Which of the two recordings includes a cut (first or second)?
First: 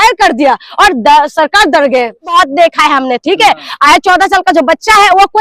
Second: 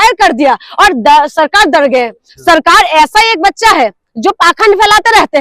first